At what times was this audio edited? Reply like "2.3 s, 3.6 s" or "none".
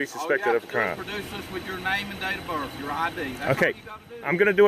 none